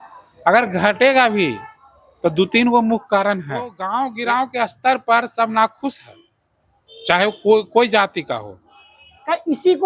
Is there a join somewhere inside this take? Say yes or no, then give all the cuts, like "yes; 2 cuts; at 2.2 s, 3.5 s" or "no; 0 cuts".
yes; 1 cut; at 3.8 s